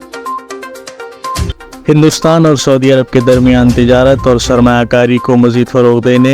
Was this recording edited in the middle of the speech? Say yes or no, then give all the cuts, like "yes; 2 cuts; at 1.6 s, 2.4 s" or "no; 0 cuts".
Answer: yes; 1 cut; at 1.5 s